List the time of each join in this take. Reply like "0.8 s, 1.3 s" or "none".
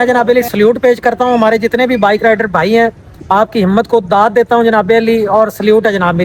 none